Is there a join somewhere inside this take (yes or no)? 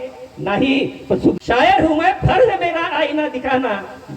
yes